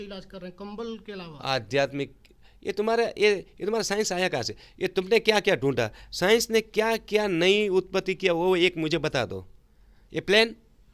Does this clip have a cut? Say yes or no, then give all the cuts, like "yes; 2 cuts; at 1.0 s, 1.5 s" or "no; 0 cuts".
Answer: no; 0 cuts